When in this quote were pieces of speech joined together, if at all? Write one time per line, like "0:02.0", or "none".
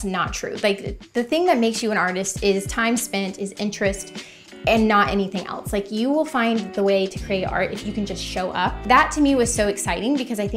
0:08.8